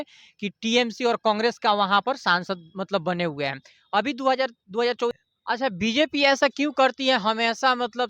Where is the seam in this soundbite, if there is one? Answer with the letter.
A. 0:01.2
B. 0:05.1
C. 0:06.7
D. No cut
B